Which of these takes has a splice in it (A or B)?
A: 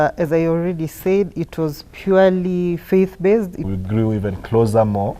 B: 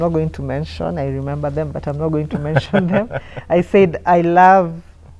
A